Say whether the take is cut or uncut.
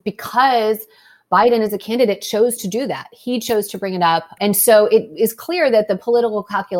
cut